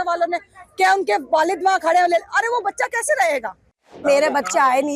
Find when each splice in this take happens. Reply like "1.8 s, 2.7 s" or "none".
4.0 s